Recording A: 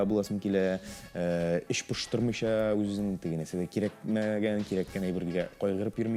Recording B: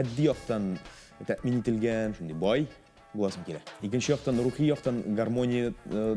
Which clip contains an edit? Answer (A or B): B